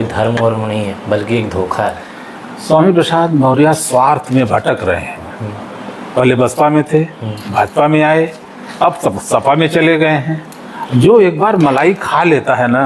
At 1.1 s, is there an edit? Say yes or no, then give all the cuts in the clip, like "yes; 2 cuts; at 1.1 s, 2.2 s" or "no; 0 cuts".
no; 1 cut; at 3.8 s